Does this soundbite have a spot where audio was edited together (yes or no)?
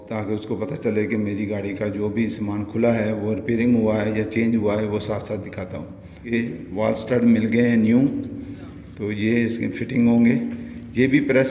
yes